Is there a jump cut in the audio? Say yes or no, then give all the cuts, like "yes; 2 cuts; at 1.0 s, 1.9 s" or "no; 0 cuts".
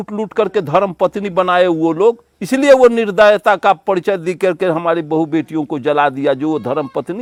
no; 0 cuts